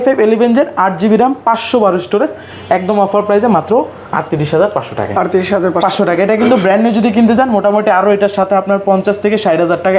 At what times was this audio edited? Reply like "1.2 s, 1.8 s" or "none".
none